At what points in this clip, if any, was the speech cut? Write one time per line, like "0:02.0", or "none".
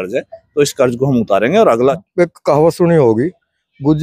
0:02.0